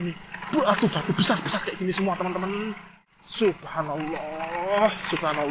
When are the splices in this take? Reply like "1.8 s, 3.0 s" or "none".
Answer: 3.0 s